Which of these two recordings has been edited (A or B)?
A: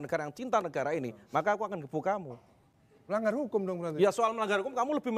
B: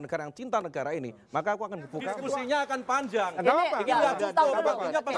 B